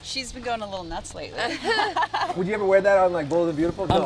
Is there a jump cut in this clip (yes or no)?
yes